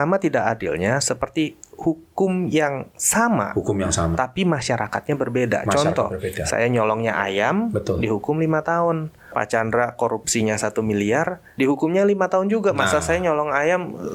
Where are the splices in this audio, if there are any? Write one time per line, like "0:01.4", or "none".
0:09.2
0:11.4